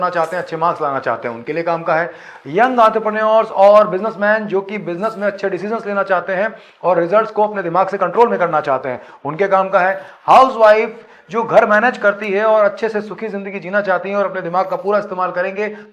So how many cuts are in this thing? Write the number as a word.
zero